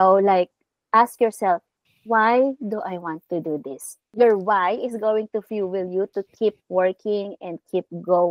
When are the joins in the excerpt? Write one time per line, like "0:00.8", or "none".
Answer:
0:04.0